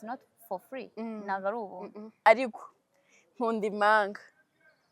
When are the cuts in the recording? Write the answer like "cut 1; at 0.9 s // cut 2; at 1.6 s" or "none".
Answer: cut 1; at 2.0 s